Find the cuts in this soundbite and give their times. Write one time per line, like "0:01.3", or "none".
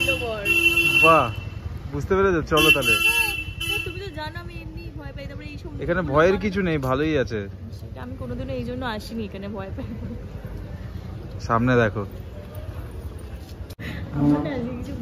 0:14.0